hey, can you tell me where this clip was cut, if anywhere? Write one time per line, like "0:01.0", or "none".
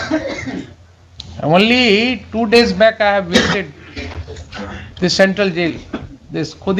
none